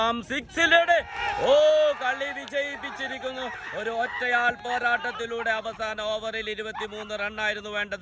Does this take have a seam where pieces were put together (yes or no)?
no